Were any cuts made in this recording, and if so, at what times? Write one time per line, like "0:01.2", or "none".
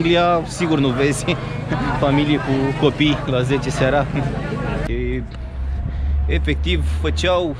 0:04.8